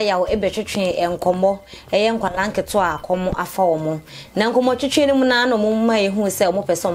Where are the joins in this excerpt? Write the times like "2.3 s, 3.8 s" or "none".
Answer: none